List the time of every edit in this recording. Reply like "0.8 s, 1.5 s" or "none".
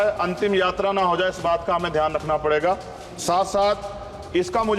none